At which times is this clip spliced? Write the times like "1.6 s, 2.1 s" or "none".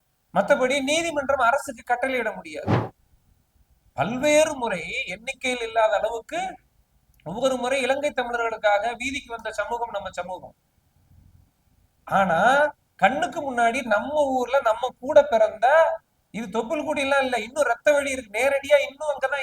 2.8 s